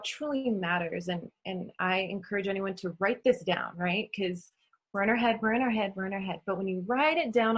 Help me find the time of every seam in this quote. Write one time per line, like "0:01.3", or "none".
none